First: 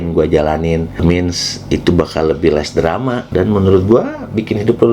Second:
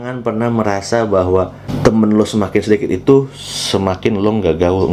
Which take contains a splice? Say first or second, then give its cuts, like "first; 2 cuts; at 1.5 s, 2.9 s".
first; 2 cuts; at 1.0 s, 3.2 s